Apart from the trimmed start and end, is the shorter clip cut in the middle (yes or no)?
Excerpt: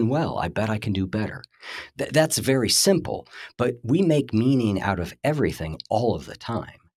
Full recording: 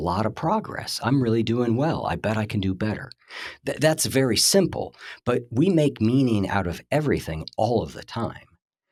no